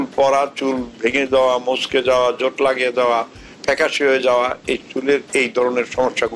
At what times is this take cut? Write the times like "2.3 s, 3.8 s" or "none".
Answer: none